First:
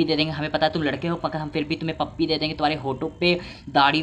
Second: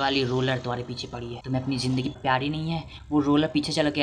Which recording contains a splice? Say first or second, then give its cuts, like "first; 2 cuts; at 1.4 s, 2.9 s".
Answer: second; 2 cuts; at 1.4 s, 2.2 s